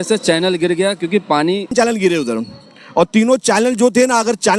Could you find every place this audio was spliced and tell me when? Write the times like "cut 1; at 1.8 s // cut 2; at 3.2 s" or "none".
cut 1; at 1.7 s